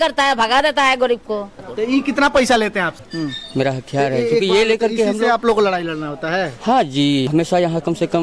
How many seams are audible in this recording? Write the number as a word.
three